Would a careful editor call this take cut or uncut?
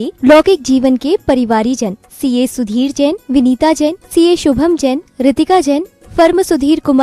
uncut